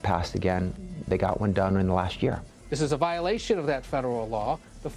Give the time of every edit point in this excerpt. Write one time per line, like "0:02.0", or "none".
none